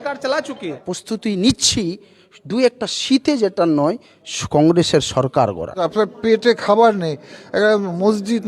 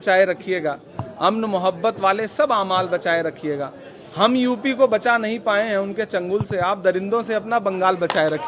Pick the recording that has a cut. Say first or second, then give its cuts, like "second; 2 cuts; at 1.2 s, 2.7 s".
first; 2 cuts; at 0.9 s, 5.9 s